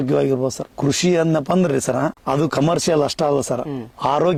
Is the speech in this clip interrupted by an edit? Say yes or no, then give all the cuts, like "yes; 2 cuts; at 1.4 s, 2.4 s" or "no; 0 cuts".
no; 0 cuts